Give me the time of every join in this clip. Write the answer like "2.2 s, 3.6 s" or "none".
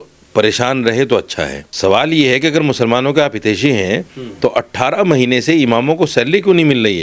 1.6 s